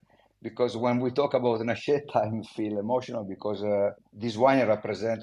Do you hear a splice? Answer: yes; 1 cut; at 4.1 s

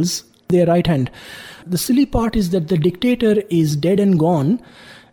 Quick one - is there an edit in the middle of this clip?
yes; 1 cut; at 1.6 s

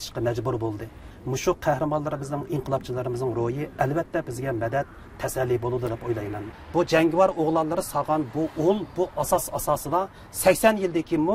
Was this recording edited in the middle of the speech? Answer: yes; 2 cuts; at 1.1 s, 6.4 s

